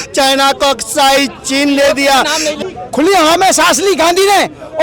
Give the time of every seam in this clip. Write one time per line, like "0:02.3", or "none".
0:02.5